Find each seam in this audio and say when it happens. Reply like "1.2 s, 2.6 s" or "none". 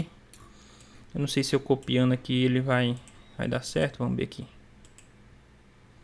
none